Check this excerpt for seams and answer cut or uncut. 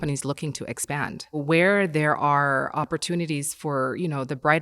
cut